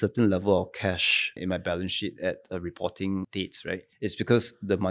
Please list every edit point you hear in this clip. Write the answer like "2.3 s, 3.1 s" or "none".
1.3 s, 3.4 s